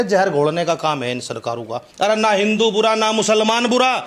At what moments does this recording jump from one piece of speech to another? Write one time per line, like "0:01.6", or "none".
0:01.8